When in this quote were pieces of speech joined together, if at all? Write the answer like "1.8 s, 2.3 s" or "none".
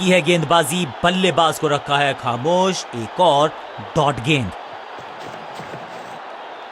4.5 s